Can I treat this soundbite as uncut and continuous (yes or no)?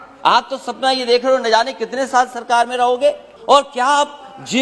no